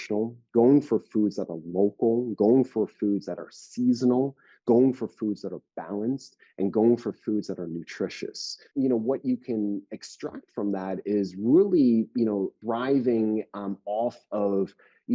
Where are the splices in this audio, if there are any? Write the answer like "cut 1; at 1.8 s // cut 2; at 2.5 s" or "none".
cut 1; at 8.7 s // cut 2; at 12.6 s